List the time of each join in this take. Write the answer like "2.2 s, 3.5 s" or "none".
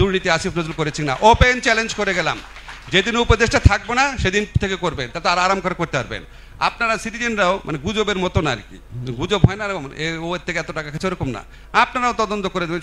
none